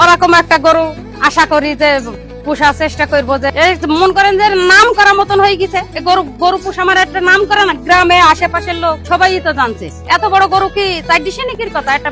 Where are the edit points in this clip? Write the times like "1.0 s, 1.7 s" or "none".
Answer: 5.9 s, 9.0 s